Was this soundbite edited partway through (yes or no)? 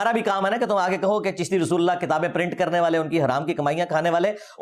no